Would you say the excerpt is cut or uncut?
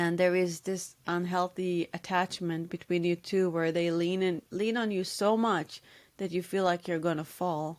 uncut